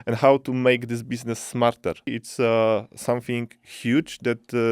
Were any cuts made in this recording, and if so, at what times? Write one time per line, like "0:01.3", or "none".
0:02.2